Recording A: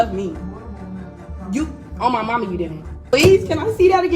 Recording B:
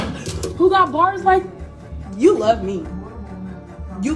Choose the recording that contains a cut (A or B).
A